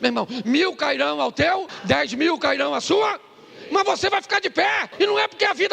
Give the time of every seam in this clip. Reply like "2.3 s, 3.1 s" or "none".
1.7 s, 4.9 s